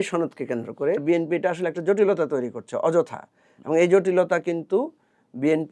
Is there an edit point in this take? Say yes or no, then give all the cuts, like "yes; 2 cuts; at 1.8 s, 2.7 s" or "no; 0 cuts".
yes; 1 cut; at 1.0 s